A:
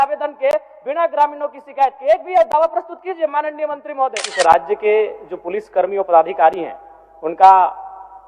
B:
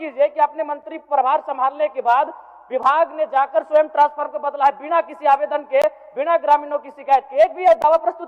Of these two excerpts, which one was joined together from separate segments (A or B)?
A